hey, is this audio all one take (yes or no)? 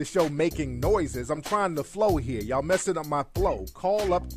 yes